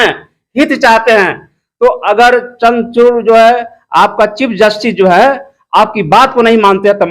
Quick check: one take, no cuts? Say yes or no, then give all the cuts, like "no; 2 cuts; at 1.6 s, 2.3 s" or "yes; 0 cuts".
yes; 0 cuts